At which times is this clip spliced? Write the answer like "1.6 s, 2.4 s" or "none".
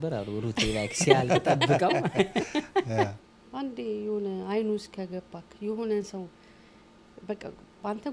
3.1 s